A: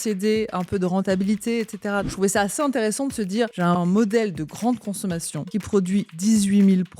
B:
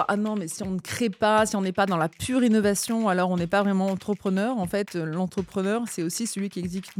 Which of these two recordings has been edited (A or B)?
A